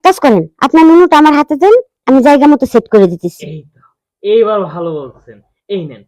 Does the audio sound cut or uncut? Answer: uncut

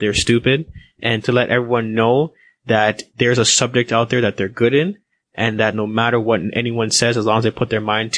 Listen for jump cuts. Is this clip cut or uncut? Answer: cut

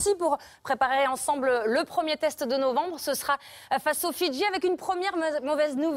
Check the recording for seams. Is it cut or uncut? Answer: uncut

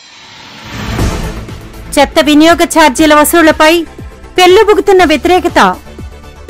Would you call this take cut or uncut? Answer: cut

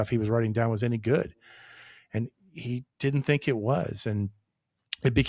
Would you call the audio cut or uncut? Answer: uncut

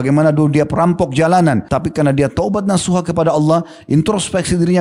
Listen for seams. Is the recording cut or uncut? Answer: cut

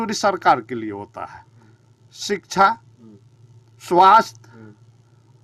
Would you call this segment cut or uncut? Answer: uncut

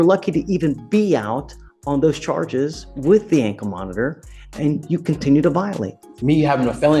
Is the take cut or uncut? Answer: cut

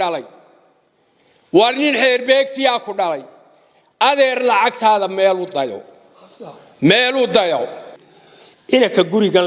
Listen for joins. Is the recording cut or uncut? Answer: cut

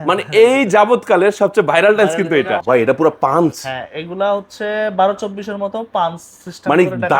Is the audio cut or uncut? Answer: cut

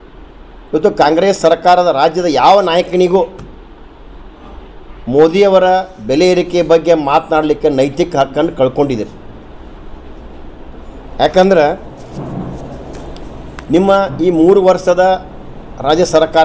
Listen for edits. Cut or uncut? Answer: uncut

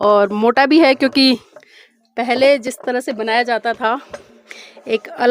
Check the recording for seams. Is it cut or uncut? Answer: uncut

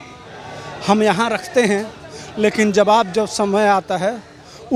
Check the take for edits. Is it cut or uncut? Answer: uncut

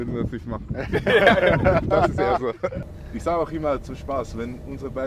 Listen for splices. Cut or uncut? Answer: cut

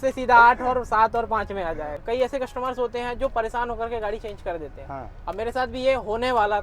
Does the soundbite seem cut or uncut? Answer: cut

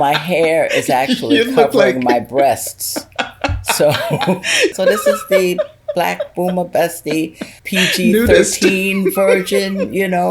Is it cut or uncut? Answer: cut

